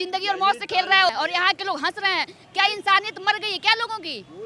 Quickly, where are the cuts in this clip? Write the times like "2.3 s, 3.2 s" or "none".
1.1 s